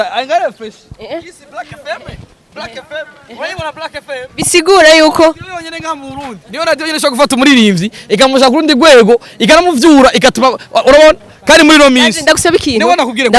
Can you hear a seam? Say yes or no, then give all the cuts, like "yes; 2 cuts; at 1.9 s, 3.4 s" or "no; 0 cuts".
no; 0 cuts